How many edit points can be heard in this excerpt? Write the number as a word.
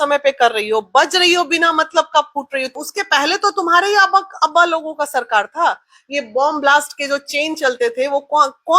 one